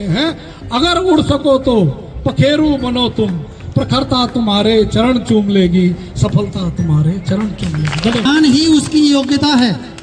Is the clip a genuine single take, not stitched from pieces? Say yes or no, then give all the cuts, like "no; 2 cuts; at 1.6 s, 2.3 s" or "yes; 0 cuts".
no; 1 cut; at 8.2 s